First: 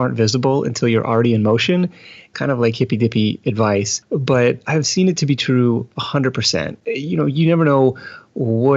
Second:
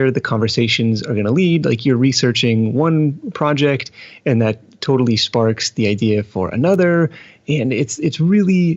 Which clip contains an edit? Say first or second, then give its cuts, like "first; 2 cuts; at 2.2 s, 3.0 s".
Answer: first; 3 cuts; at 2.3 s, 4.5 s, 6.8 s